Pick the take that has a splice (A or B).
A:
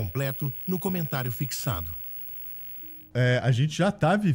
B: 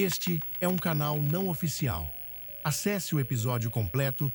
A